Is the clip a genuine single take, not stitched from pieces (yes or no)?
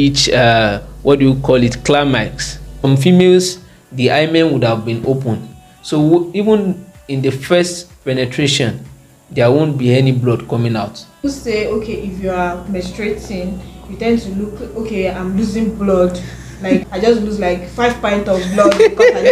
no